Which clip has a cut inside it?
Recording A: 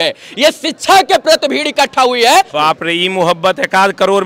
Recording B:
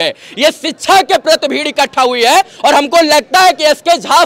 A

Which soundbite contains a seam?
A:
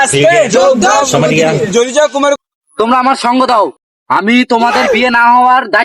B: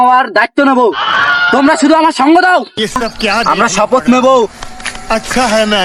A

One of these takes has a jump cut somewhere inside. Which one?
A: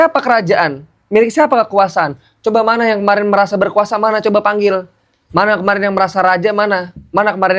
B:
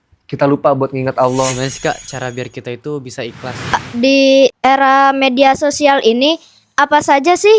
B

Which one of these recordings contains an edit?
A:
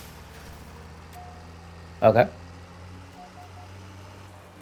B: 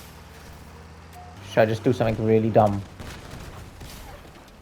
B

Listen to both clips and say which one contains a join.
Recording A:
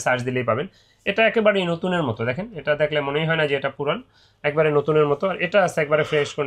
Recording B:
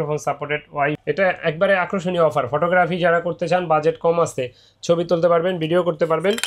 B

